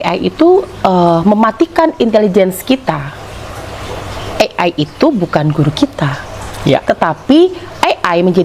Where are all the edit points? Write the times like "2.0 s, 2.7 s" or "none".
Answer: none